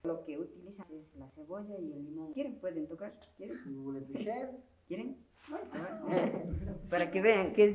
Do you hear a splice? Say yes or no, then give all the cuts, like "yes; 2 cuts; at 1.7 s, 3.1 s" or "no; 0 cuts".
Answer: yes; 1 cut; at 2.3 s